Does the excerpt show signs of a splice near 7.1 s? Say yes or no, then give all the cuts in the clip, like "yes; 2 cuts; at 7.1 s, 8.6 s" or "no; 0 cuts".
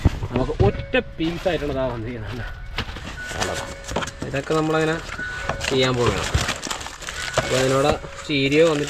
no; 1 cut; at 3.1 s